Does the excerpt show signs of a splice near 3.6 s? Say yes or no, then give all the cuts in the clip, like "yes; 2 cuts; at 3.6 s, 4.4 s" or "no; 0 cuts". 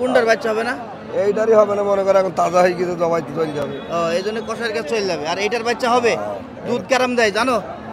no; 0 cuts